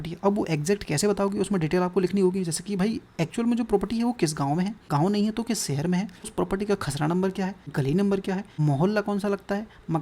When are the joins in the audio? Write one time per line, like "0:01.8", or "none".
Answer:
0:04.8
0:06.3
0:07.6
0:08.5